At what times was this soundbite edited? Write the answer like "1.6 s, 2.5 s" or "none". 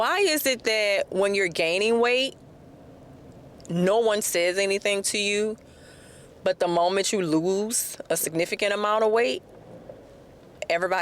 none